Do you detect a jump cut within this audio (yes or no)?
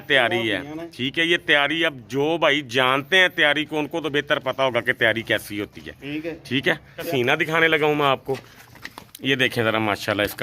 yes